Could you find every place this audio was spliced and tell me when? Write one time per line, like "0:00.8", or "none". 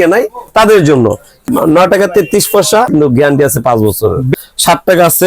0:01.4
0:02.9
0:04.3